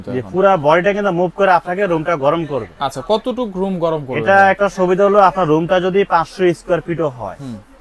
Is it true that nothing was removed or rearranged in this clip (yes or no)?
yes